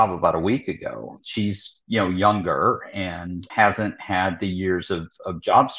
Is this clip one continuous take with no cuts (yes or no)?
no